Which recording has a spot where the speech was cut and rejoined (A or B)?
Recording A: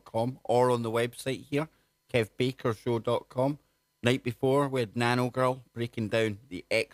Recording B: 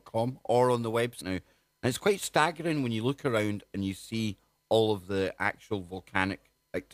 A